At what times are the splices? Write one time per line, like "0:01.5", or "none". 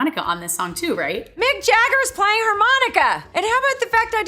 0:03.3

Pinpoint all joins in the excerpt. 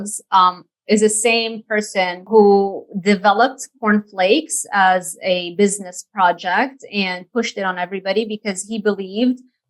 0:02.2

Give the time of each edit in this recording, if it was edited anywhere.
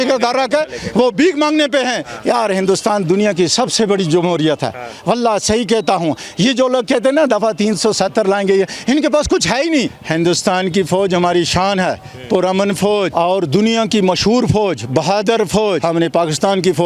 0:02.1
0:10.0
0:13.1
0:15.8

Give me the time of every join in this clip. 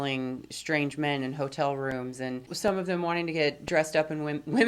0:02.5

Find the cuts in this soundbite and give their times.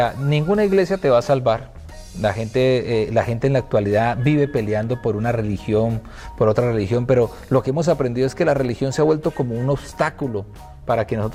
none

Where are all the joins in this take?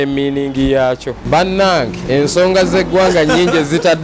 0:01.2

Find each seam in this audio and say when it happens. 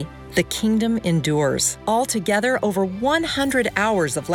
none

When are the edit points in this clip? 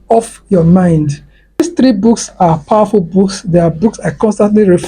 0:01.6

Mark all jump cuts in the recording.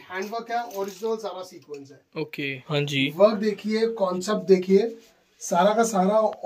0:02.6

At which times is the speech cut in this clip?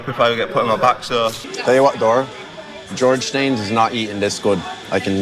0:01.4

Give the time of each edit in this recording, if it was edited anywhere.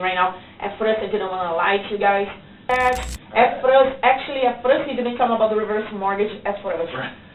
0:02.7

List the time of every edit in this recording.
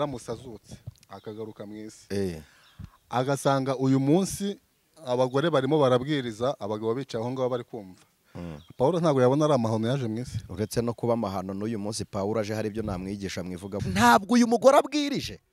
0:13.8

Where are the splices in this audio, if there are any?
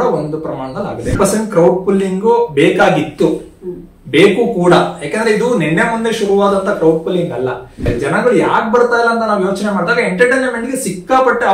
0:01.2
0:07.8

